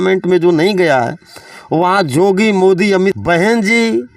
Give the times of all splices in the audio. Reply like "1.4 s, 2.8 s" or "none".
3.2 s